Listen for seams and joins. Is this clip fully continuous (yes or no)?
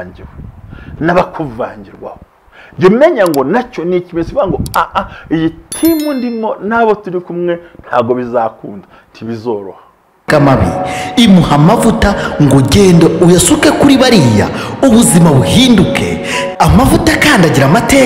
no